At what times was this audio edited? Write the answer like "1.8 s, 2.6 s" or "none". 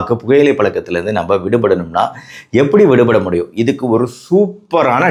none